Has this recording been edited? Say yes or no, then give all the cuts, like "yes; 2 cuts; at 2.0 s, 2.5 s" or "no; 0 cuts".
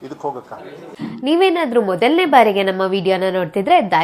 yes; 1 cut; at 0.9 s